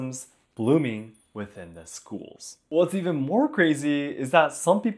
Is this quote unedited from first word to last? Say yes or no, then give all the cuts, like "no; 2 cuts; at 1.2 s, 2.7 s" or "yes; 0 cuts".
no; 1 cut; at 2.5 s